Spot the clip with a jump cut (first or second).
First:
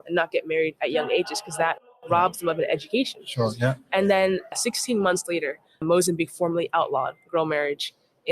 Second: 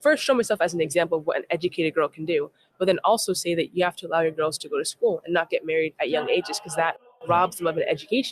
first